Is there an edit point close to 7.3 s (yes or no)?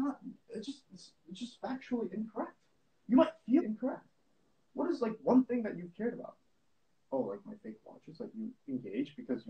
no